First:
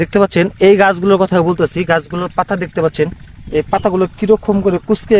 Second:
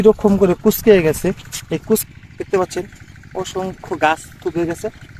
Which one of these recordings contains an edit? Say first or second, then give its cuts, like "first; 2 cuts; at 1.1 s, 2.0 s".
second; 1 cut; at 2.0 s